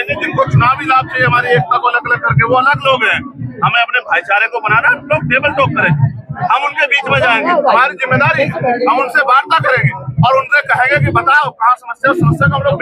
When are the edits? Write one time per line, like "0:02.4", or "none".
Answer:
none